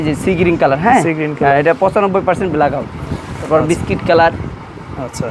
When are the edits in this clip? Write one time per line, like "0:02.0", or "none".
none